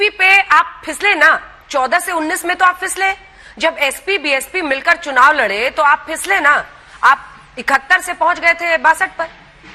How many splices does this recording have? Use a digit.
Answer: 0